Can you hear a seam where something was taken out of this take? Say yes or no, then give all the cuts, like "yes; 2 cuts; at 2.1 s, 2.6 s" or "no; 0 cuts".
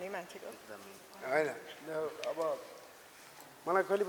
no; 0 cuts